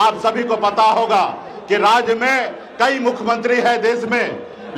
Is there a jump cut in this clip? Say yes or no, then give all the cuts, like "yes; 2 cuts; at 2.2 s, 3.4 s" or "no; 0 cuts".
no; 0 cuts